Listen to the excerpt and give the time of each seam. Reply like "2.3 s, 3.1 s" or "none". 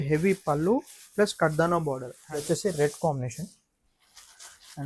2.1 s